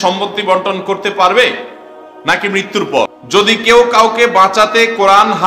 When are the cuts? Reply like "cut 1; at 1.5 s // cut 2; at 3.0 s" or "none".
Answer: cut 1; at 3.5 s